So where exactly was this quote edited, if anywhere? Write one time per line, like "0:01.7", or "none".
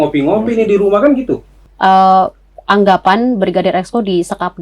0:01.6